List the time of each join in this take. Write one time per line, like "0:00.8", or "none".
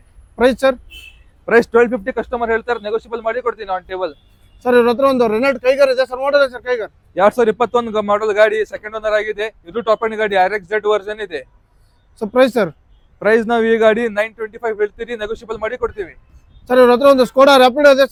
none